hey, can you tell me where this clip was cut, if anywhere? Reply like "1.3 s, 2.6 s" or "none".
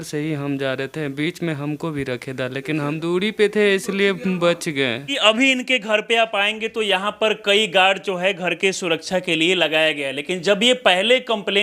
3.0 s, 5.2 s